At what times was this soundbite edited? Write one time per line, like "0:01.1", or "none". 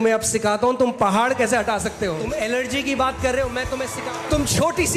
0:02.2
0:03.9